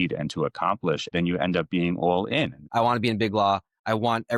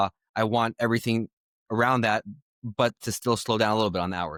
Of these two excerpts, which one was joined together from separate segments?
first; 2 cuts; at 1.1 s, 2.6 s

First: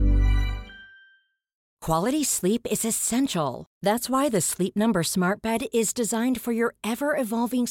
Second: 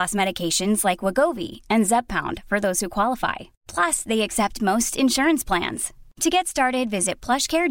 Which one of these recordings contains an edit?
first; 1 cut; at 1.7 s

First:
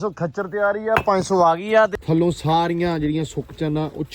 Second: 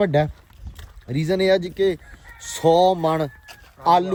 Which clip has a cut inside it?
first; 1 cut; at 1.9 s

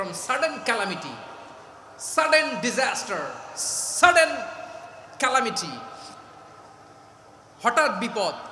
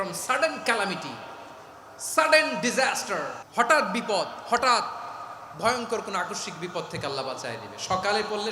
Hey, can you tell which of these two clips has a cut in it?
second; 1 cut; at 3.4 s

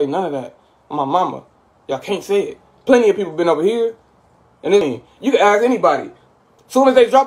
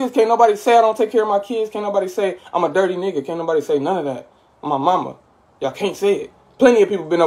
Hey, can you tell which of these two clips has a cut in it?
first; 1 cut; at 4.8 s

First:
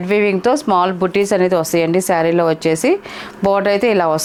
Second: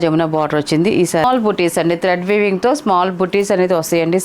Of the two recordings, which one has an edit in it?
second; 1 cut; at 1.2 s

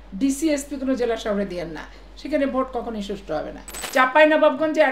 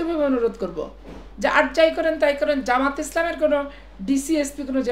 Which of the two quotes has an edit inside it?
first; 1 cut; at 3.6 s

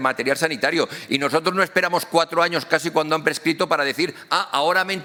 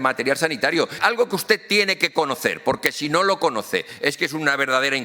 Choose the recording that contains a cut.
second; 1 cut; at 1.0 s

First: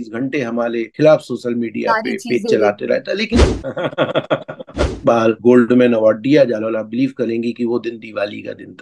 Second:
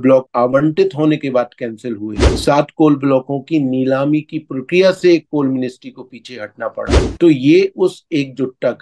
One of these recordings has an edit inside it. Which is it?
first; 2 cuts; at 3.5 s, 5.2 s

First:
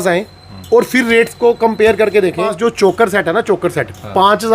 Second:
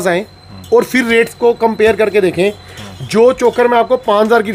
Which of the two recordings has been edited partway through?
first; 1 cut; at 2.5 s

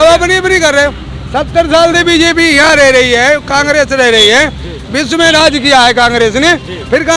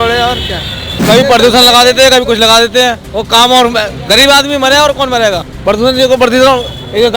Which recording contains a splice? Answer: second; 3 cuts; at 1.0 s, 3.1 s, 5.5 s

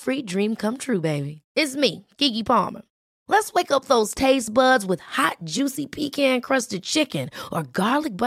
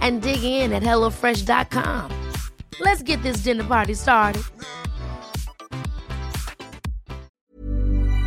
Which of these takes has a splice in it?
second; 1 cut; at 7.3 s

